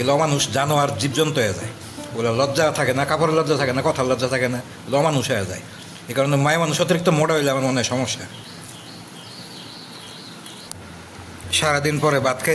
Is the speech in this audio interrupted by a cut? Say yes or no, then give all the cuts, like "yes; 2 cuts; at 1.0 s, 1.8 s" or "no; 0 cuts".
no; 0 cuts